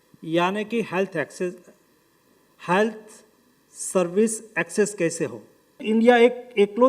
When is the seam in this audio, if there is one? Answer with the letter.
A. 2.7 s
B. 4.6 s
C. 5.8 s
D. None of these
C